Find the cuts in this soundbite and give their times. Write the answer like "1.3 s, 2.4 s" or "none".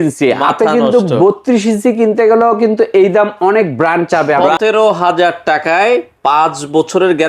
4.5 s